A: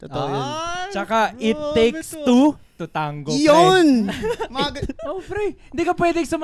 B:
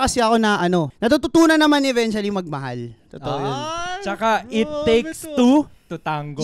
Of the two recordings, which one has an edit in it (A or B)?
B